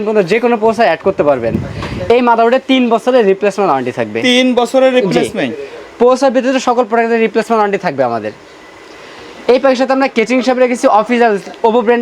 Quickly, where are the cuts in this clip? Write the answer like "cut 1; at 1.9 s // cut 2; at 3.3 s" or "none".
none